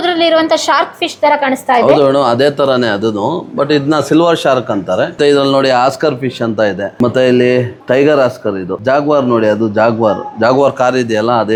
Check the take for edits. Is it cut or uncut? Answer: uncut